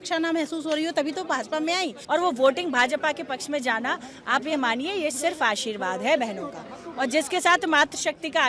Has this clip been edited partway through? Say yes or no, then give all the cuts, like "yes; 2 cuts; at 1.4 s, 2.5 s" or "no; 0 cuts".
yes; 1 cut; at 2.0 s